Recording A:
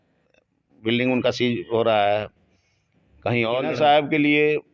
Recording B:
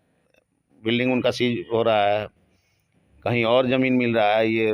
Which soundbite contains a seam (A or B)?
A